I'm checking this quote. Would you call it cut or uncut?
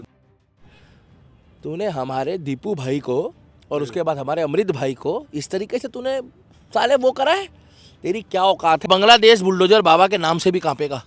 cut